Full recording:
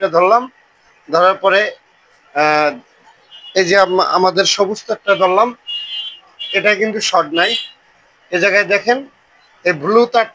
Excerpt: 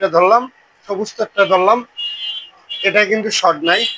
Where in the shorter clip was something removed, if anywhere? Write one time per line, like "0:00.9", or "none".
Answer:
0:00.9